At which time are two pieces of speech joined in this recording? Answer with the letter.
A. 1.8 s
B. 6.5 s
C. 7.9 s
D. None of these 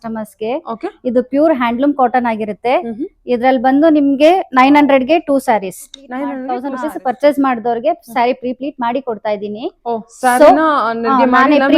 B